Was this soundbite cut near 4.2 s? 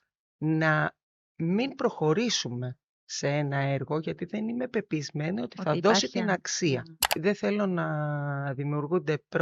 no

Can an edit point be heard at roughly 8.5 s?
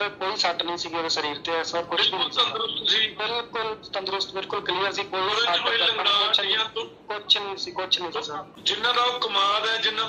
yes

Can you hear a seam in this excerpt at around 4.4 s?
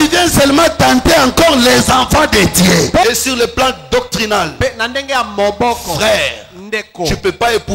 no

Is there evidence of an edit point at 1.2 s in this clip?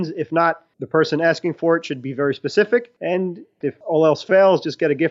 no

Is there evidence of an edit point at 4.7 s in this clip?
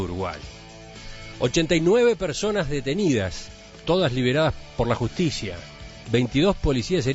no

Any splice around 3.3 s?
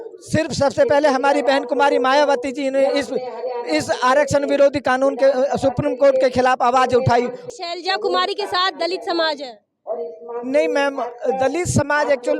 no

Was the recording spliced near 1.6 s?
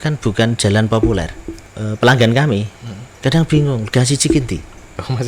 yes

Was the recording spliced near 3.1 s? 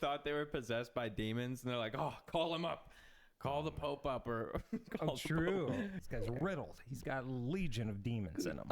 no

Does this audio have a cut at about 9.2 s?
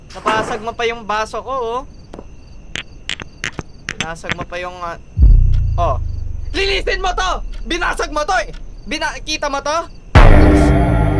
no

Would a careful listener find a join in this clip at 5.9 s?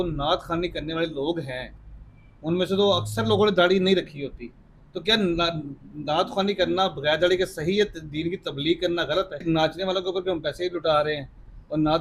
no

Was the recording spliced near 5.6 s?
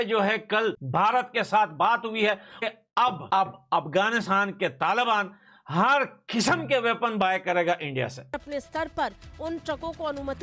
no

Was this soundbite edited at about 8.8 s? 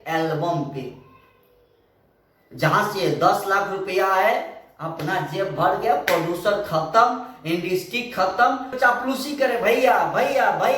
yes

